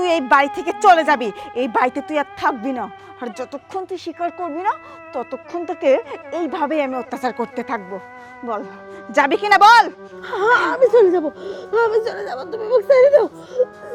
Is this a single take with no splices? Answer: yes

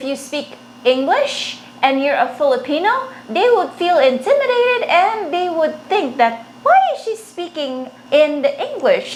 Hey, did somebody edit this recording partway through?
no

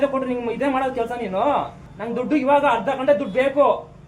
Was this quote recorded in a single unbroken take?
no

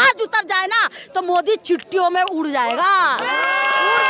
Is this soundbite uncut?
yes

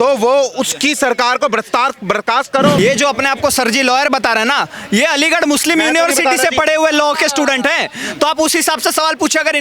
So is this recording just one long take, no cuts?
no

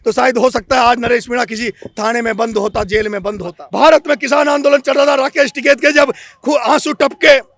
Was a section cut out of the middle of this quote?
yes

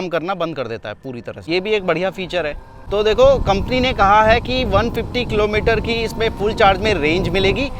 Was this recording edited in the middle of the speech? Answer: no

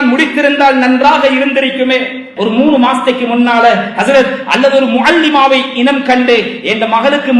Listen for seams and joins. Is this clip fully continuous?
no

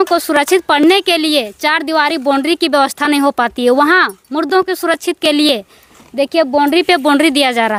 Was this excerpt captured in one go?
yes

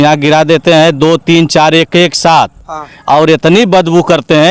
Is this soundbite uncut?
yes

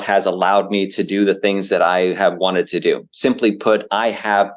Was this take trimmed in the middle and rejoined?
no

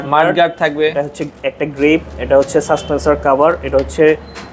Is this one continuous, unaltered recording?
yes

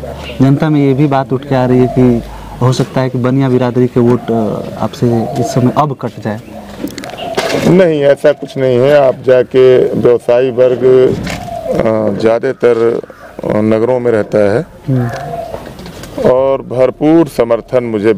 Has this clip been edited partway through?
no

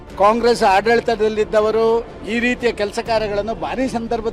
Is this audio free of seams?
yes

